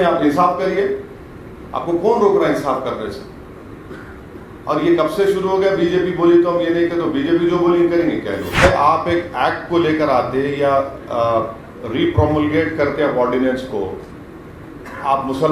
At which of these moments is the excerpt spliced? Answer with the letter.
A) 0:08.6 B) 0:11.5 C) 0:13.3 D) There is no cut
A